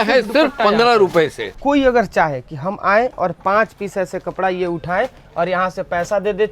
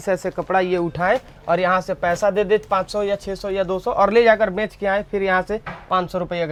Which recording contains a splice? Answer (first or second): first